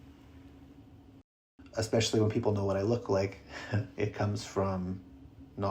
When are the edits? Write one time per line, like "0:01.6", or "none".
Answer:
0:01.3